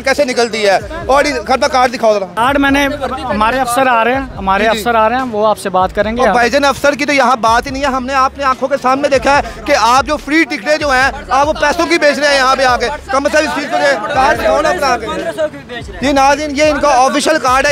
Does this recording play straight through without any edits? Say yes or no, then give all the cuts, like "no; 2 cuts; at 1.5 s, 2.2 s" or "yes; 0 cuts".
no; 1 cut; at 2.3 s